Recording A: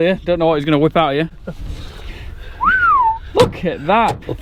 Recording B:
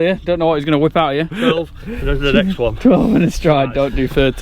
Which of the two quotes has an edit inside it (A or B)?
B